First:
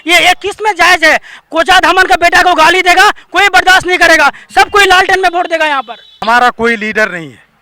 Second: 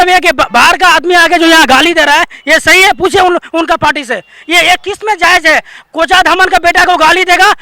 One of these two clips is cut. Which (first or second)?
first